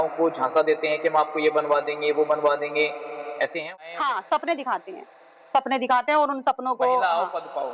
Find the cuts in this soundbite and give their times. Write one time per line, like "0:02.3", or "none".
0:03.7